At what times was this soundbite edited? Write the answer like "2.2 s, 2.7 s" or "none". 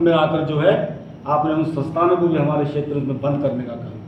none